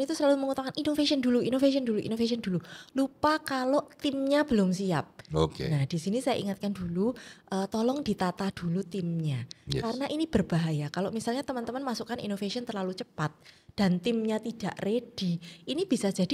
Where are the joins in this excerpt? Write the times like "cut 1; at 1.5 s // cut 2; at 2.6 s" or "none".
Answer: none